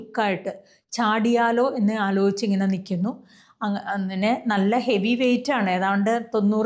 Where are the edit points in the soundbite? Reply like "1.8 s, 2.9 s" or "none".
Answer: none